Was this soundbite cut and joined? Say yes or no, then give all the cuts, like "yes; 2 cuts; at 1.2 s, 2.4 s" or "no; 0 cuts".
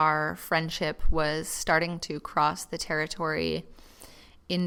no; 0 cuts